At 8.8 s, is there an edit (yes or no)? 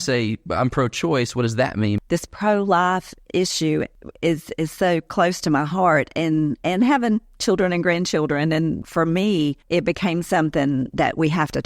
yes